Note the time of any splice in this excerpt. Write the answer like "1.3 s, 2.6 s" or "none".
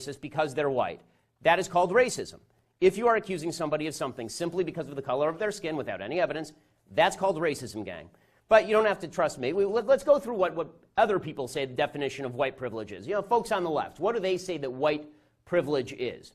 14.2 s